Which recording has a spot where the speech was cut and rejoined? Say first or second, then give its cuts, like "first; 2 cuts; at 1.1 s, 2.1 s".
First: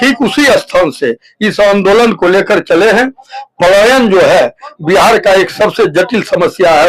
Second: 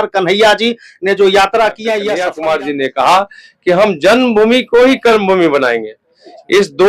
second; 1 cut; at 2.2 s